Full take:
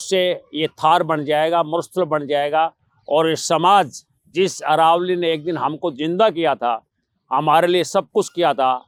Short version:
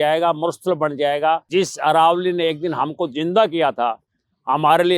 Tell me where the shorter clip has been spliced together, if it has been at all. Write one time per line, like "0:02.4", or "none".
0:01.4